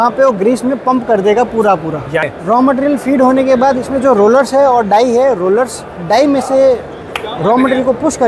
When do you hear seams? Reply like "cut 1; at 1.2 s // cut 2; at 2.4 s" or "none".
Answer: cut 1; at 2.2 s